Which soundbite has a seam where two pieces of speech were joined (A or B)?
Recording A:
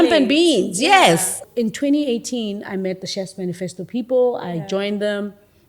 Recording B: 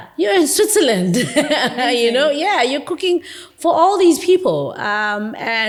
A